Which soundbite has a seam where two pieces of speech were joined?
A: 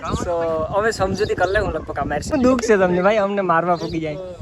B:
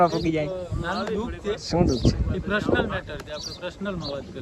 A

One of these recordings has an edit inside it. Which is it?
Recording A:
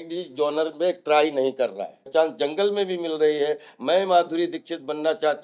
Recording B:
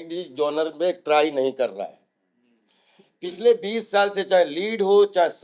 A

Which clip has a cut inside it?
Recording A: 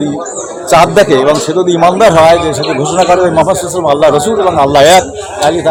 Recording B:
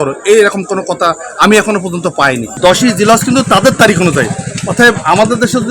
B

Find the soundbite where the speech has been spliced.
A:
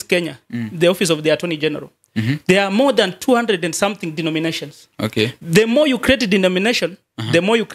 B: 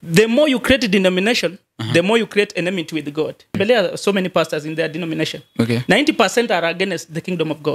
B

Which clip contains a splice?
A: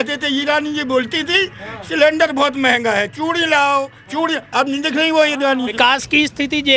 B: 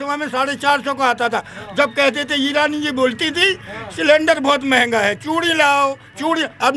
A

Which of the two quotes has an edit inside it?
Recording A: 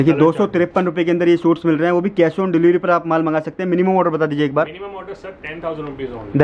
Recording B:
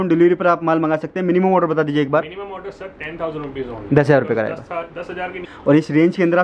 B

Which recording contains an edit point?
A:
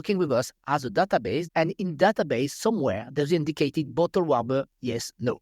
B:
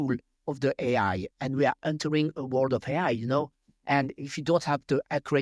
A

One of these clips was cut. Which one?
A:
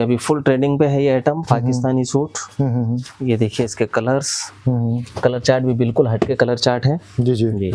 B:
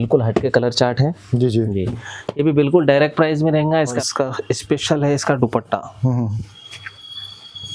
B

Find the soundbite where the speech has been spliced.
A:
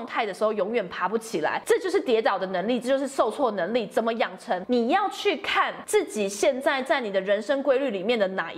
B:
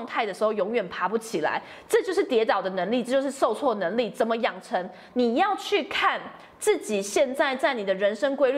A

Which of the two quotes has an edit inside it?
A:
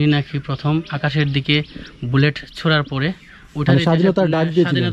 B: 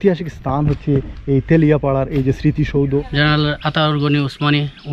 B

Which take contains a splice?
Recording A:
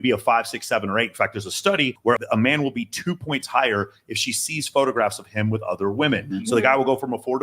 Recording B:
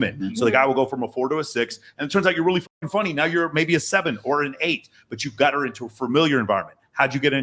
A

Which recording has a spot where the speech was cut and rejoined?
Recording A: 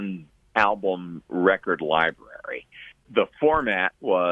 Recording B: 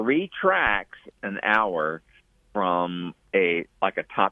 A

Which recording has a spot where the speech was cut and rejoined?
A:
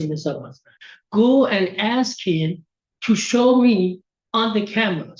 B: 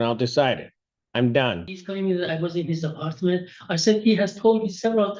B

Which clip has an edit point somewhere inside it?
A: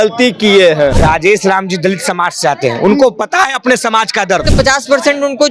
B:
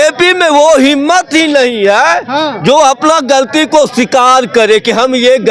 A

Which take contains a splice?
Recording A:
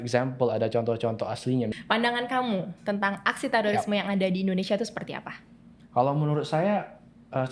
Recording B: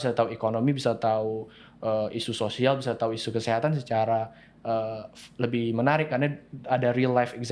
A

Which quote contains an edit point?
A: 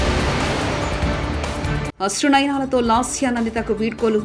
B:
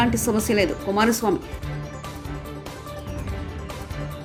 A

